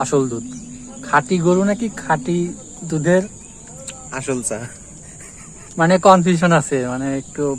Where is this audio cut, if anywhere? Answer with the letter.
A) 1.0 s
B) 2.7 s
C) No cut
C